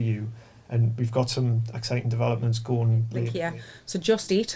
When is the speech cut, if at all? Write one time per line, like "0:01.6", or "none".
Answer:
0:03.3